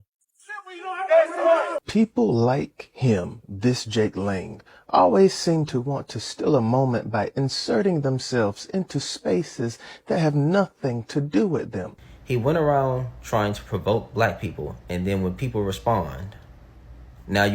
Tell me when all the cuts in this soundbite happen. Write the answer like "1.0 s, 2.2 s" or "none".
1.8 s, 11.9 s